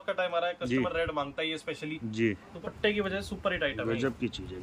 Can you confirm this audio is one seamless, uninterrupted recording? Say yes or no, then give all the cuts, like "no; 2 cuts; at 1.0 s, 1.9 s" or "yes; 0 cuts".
no; 1 cut; at 2.5 s